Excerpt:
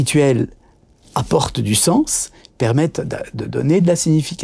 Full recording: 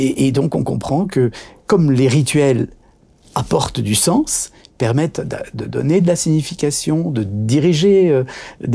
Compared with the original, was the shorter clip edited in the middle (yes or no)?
no